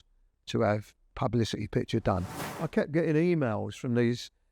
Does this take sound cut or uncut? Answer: cut